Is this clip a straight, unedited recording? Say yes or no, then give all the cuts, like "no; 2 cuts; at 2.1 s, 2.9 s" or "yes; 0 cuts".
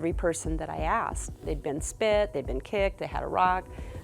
no; 1 cut; at 1.4 s